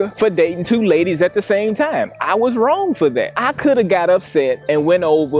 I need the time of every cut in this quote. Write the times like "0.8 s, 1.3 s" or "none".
none